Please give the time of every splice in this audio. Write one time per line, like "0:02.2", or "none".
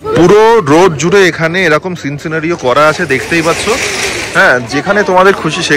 none